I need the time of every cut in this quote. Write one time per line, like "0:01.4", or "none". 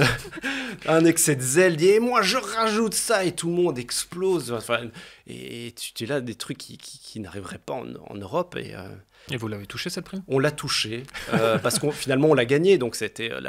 0:09.2